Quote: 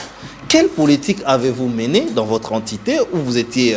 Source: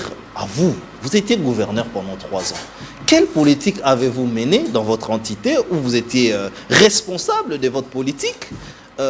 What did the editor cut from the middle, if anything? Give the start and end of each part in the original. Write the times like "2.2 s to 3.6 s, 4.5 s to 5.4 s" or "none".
none